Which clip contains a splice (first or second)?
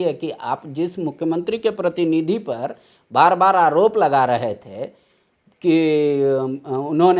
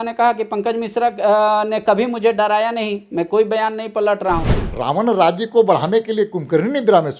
second